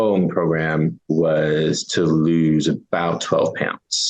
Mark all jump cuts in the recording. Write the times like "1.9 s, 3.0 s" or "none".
1.0 s